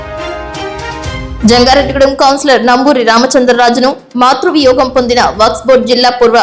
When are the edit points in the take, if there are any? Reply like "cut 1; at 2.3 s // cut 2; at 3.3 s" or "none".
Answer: cut 1; at 0.9 s